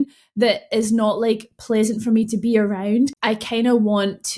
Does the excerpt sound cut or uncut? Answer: cut